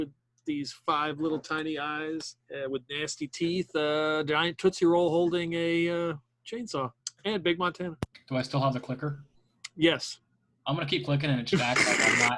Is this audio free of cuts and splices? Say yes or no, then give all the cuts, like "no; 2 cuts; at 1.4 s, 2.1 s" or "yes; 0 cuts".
no; 3 cuts; at 2.4 s, 7.1 s, 8.1 s